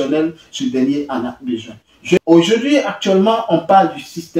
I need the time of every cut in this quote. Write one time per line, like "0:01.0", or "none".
0:02.2